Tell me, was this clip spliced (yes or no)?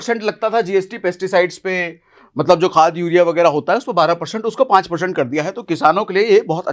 no